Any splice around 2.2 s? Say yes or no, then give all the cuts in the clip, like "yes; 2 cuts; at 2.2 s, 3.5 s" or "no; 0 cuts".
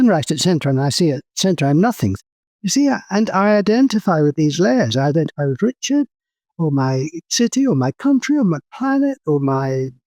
yes; 1 cut; at 2.2 s